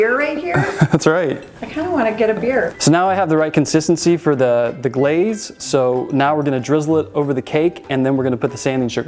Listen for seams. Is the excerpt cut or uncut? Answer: uncut